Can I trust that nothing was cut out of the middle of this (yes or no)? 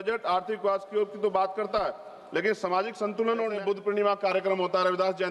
no